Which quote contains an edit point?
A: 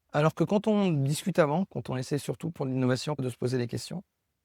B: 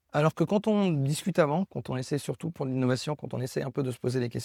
A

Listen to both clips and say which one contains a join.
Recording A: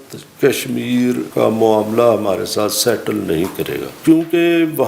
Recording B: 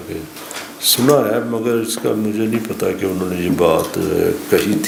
A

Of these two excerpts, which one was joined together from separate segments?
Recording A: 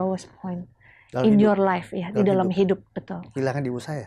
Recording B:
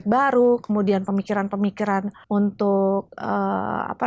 B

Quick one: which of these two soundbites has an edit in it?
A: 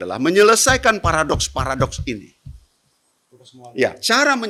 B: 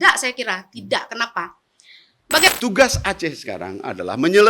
B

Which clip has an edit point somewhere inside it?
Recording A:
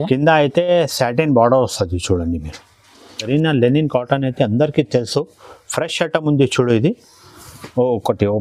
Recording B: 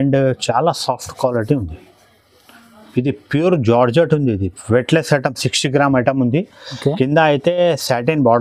A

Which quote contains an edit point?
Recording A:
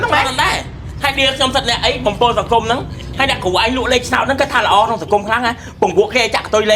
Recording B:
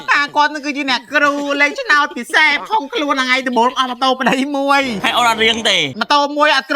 B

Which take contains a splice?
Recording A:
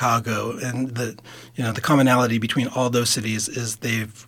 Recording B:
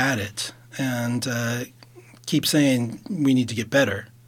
B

